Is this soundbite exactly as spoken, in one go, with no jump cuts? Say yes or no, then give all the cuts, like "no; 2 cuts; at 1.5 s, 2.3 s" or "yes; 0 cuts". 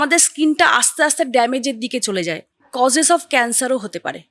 no; 1 cut; at 2.7 s